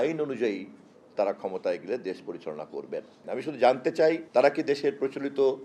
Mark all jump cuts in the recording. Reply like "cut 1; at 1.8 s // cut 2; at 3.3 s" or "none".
cut 1; at 3.2 s // cut 2; at 4.2 s